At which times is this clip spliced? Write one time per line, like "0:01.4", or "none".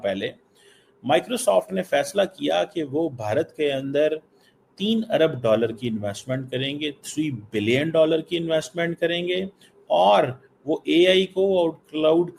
none